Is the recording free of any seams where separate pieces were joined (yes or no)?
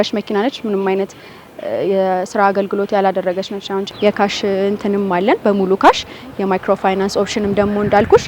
no